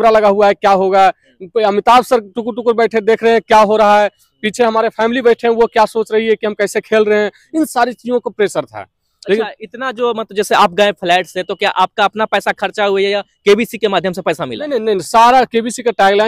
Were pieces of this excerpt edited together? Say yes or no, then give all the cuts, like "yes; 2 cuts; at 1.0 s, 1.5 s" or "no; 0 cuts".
no; 0 cuts